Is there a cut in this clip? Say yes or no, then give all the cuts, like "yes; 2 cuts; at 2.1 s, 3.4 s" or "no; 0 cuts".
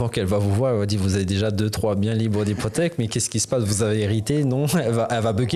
no; 0 cuts